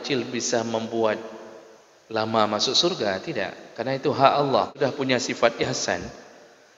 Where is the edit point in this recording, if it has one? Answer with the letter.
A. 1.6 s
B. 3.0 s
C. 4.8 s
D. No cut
C